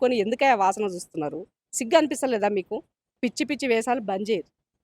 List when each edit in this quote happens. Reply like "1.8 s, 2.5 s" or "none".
3.1 s